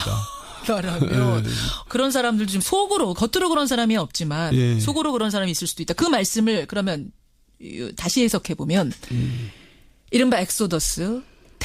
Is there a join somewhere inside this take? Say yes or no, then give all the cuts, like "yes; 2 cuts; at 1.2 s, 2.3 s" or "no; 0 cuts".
yes; 1 cut; at 3.1 s